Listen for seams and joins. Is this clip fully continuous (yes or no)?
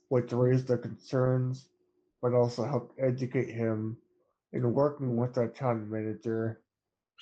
yes